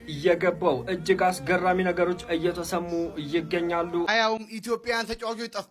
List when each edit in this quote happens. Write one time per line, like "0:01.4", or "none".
0:04.1